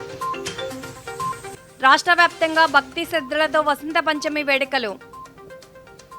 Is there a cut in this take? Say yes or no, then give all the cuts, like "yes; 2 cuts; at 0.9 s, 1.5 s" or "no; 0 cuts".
yes; 1 cut; at 1.1 s